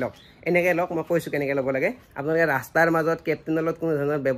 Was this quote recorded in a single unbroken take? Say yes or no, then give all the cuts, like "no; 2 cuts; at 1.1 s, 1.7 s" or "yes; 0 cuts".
no; 1 cut; at 2.1 s